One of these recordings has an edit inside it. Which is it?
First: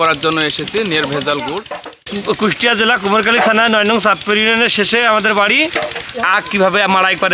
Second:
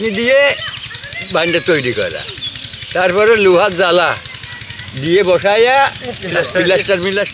first; 2 cuts; at 2.0 s, 6.2 s

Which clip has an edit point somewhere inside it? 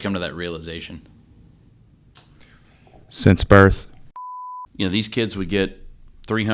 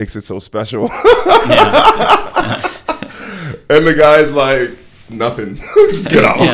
first; 1 cut; at 4.3 s

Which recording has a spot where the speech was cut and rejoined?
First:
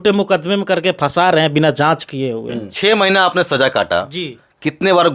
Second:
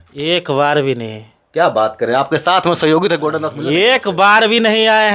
first; 1 cut; at 2.7 s

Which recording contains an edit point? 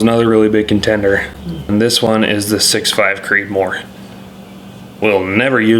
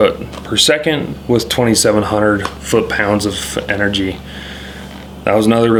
first; 1 cut; at 1.7 s

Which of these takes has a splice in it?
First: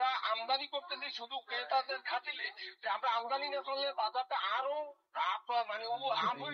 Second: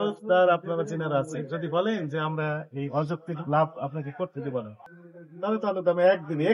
second; 1 cut; at 4.8 s

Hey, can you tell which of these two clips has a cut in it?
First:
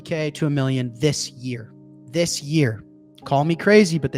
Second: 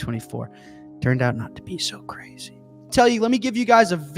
second; 1 cut; at 2.9 s

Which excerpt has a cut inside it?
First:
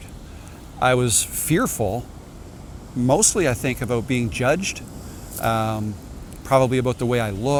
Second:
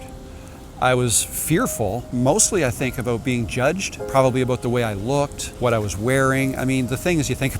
second; 3 cuts; at 2.0 s, 3.9 s, 5.4 s

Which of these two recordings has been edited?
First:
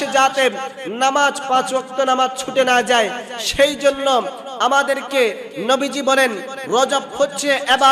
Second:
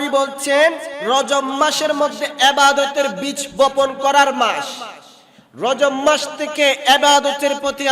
second; 1 cut; at 0.9 s

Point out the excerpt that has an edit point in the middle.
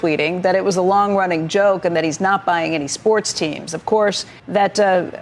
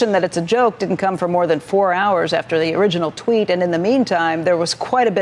first; 1 cut; at 4.3 s

